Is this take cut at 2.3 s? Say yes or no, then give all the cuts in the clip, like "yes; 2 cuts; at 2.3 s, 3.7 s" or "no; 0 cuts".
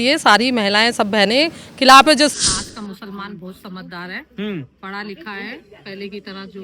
yes; 1 cut; at 2.3 s